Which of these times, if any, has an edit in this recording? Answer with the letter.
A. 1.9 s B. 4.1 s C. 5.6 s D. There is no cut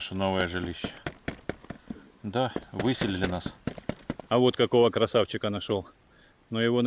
B